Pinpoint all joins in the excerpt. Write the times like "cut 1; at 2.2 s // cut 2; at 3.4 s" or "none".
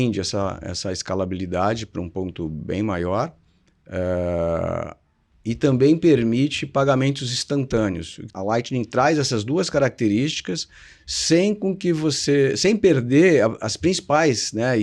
cut 1; at 8.3 s

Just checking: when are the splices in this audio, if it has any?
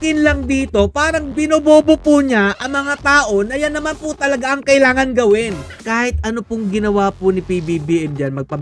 cut 1; at 1.3 s // cut 2; at 5.8 s

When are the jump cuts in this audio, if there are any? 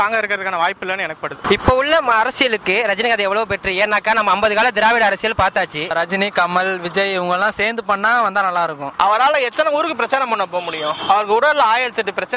cut 1; at 1.4 s // cut 2; at 5.9 s // cut 3; at 8.9 s

